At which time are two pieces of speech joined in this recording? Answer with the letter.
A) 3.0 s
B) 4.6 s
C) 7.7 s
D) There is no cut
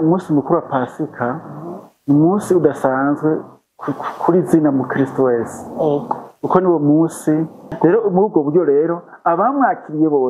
C